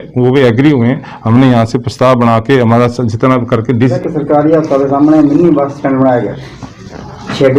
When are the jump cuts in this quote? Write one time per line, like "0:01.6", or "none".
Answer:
0:04.0